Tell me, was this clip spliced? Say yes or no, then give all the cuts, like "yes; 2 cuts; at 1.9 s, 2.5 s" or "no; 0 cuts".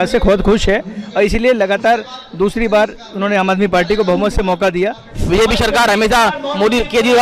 yes; 1 cut; at 5.2 s